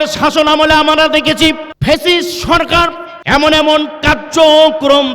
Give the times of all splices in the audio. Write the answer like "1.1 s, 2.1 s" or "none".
1.7 s, 3.1 s